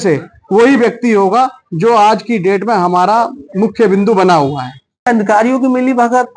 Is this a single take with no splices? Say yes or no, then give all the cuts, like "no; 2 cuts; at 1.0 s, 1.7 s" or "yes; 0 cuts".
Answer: no; 1 cut; at 5.1 s